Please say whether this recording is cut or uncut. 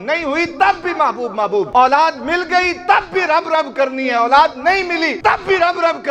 cut